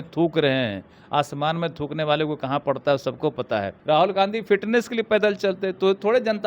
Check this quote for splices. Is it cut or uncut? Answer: cut